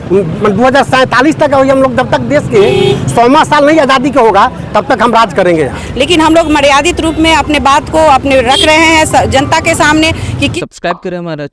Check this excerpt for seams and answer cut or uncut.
cut